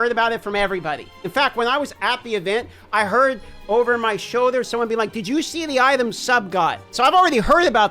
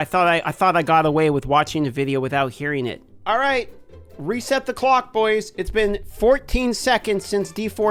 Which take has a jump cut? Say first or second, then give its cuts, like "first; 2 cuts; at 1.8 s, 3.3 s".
first; 2 cuts; at 1.2 s, 6.9 s